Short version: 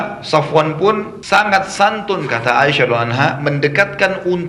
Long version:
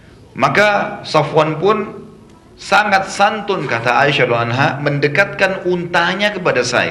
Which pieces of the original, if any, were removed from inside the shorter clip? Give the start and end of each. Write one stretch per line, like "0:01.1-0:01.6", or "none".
0:02.0-0:02.5